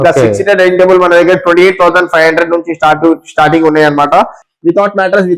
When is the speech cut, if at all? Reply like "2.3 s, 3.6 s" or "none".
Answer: 4.4 s